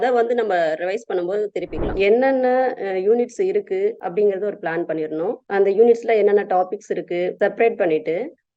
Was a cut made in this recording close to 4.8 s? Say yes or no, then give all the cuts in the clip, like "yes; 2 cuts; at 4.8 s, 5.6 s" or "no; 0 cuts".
no; 1 cut; at 1.9 s